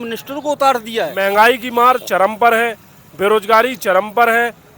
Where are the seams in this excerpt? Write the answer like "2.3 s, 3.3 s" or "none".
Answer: 1.1 s